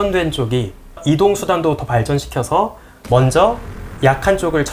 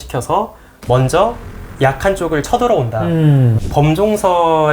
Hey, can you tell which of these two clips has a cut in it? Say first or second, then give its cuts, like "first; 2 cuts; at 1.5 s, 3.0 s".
second; 1 cut; at 3.6 s